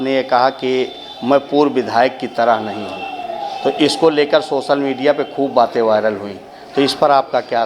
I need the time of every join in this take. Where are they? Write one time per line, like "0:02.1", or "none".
none